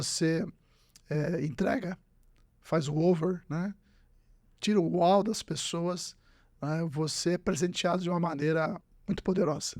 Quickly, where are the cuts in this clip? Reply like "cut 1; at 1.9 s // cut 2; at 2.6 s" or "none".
cut 1; at 8.9 s